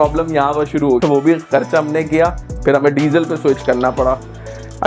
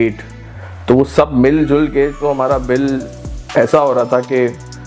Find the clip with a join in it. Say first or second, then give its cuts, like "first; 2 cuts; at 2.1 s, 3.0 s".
first; 2 cuts; at 1.0 s, 2.5 s